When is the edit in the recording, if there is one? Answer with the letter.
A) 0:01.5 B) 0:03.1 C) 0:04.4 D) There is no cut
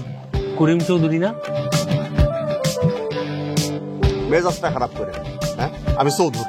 D